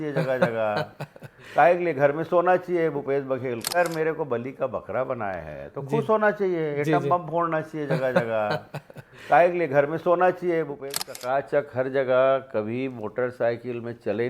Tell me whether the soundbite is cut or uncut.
cut